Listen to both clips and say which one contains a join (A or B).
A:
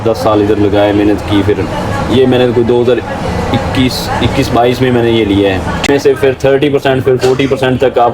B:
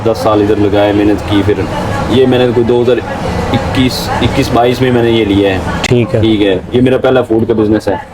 A